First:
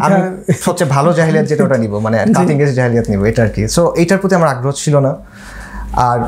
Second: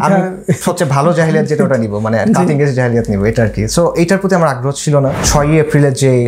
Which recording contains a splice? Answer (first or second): second